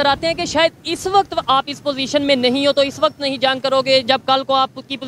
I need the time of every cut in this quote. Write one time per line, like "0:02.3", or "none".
none

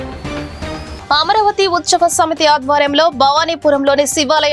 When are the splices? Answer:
0:00.9

